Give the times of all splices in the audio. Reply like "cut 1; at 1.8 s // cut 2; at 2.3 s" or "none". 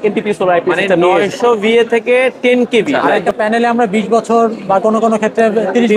cut 1; at 3.2 s